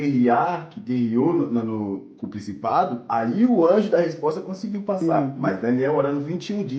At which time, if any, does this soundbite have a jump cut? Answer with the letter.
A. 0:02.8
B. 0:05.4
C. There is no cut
B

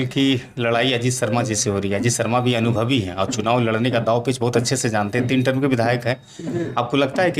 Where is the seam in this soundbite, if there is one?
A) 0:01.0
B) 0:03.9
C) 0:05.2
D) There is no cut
D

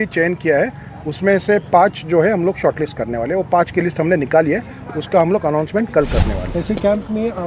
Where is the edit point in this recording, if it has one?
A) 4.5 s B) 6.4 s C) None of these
B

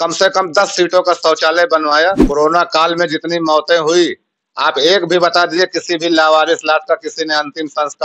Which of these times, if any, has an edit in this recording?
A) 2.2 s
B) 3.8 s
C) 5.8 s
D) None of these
A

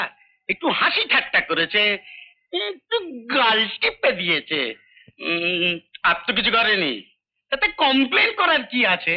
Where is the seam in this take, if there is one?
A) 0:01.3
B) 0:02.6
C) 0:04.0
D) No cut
D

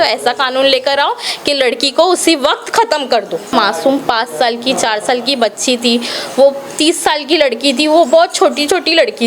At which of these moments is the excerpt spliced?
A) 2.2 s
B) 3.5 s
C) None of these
B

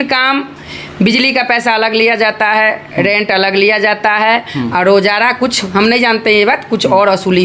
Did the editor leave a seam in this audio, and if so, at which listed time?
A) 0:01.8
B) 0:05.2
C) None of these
C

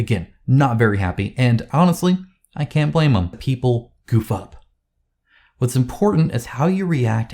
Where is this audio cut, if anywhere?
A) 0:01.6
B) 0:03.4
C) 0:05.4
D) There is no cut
B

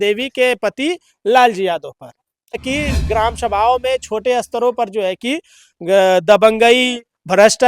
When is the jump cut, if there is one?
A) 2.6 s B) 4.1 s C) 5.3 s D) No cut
A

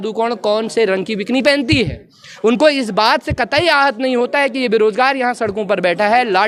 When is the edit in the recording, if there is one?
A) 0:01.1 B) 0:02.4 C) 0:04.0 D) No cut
D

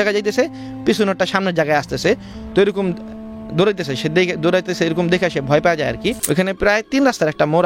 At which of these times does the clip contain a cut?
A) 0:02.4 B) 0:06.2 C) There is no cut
B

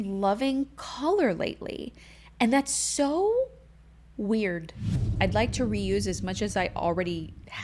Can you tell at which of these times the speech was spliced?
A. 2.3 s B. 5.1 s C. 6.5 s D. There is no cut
B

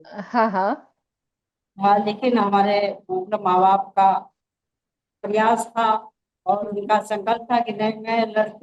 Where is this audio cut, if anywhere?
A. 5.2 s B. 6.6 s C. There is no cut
C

